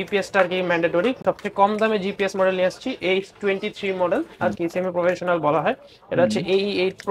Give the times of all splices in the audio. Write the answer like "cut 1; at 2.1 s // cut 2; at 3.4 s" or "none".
cut 1; at 1.2 s // cut 2; at 4.4 s